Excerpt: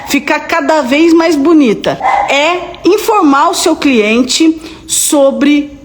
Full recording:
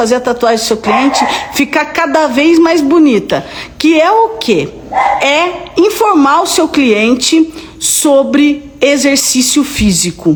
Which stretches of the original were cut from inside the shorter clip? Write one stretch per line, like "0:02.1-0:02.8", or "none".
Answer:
0:03.4-0:04.8

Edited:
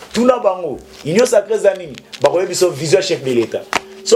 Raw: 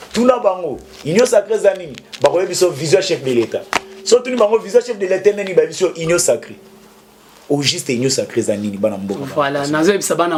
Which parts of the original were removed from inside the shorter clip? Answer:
none

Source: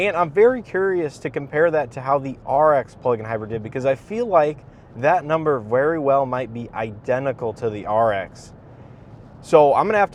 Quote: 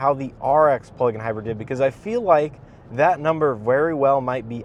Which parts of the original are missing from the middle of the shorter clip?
none

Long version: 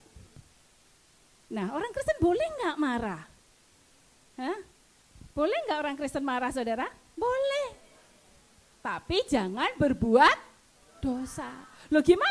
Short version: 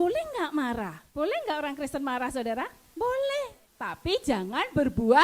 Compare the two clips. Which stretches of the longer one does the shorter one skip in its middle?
0:03.3-0:05.2
0:07.9-0:08.7

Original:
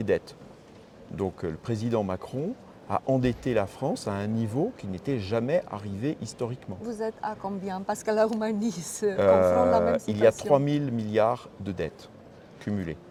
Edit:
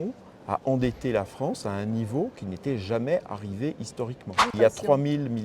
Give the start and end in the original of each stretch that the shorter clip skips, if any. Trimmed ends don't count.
0:06.9-0:10.1

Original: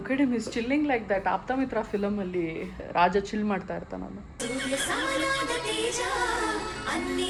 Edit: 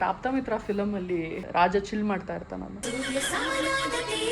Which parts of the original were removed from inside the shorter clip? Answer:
0:02.6-0:02.8
0:04.1-0:04.3

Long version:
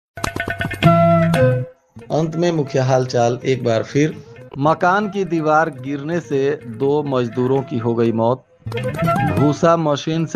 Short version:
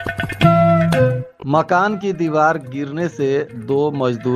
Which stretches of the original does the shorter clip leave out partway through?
0:01.7-0:04.4

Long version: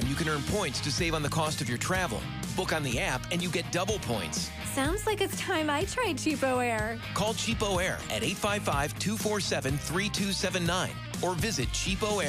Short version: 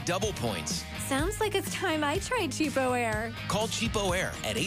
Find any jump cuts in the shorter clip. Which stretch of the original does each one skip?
none

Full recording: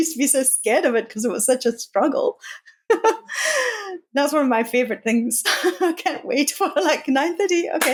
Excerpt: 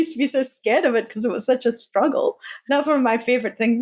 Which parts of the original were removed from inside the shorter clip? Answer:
0:02.5-0:04.0

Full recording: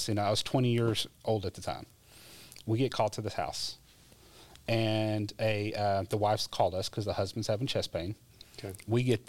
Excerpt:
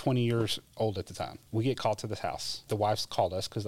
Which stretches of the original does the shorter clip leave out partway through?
0:01.9-0:02.5
0:03.8-0:06.1

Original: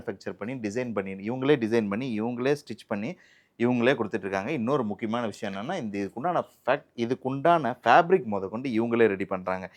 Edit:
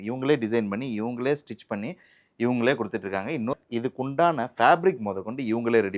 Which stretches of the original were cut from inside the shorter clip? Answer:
0:04.7-0:06.8

